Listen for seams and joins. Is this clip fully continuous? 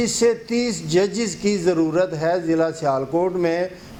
yes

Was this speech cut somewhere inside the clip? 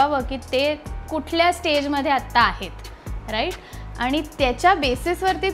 no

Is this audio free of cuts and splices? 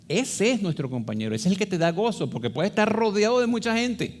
yes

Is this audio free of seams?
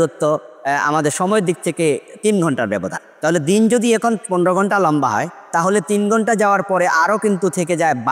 yes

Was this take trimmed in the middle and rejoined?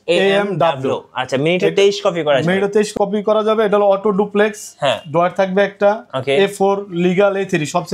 yes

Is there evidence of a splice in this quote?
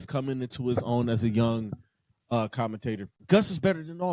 yes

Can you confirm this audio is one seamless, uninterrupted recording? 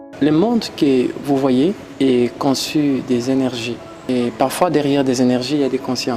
no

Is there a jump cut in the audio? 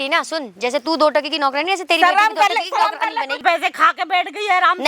yes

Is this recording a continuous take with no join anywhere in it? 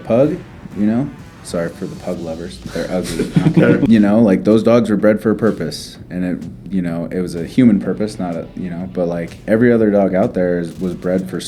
no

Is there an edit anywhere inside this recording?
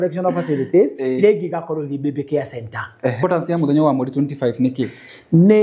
yes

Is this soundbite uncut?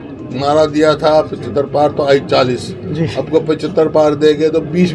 yes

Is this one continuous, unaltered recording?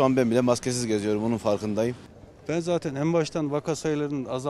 no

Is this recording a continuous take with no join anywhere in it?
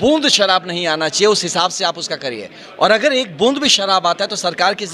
yes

